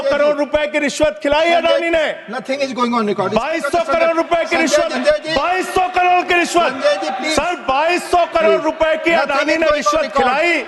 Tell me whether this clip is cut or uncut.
cut